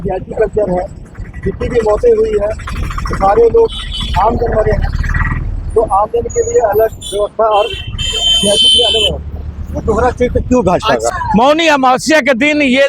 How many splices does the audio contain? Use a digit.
1